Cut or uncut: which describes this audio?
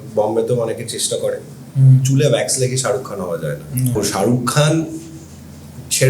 cut